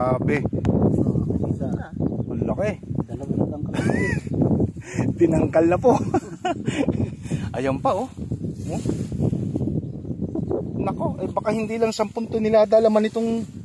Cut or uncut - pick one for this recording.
uncut